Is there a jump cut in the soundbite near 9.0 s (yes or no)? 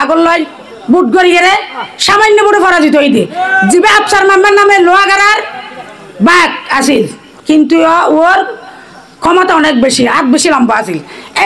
no